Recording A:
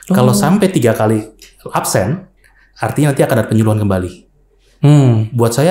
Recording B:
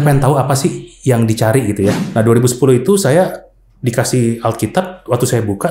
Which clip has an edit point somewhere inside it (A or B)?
B